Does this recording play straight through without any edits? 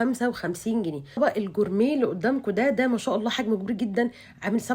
no; 1 cut; at 1.2 s

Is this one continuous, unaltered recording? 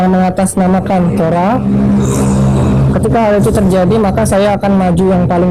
yes; 0 cuts

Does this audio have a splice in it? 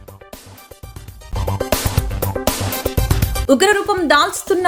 no; 0 cuts

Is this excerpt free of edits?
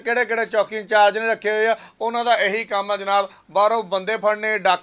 yes; 0 cuts

